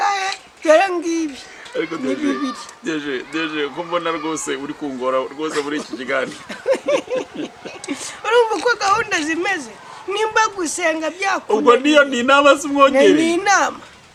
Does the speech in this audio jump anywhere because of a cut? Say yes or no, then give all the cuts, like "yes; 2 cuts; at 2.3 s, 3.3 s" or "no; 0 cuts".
no; 0 cuts